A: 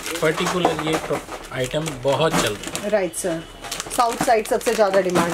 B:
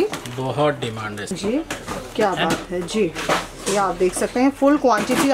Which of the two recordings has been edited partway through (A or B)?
B